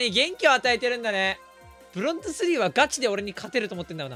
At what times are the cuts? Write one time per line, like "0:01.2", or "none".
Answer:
none